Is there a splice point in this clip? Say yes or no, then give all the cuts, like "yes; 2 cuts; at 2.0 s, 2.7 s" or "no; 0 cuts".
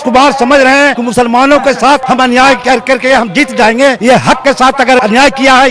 yes; 4 cuts; at 1.0 s, 2.0 s, 4.0 s, 5.0 s